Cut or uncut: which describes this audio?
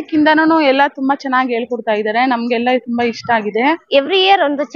cut